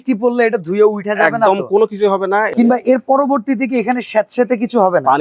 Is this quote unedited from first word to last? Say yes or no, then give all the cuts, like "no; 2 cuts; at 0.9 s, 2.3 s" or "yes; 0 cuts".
no; 1 cut; at 2.5 s